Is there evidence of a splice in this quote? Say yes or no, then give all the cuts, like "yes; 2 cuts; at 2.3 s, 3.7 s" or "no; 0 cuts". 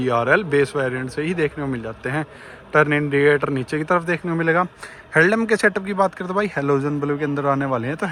no; 0 cuts